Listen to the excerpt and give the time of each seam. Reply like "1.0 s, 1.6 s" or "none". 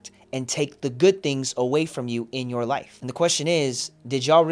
3.0 s

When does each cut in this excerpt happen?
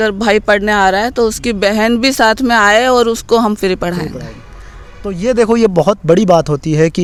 none

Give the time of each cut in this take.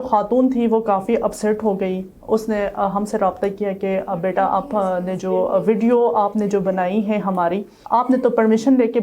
none

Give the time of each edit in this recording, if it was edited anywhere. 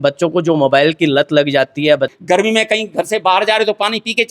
2.2 s

